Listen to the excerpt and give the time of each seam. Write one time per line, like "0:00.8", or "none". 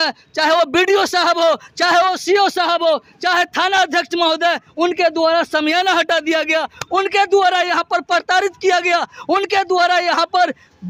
none